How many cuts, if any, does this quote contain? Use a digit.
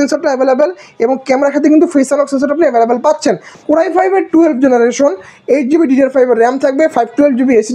1